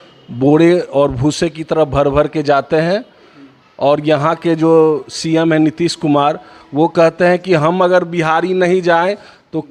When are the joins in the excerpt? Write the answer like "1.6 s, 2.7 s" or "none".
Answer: none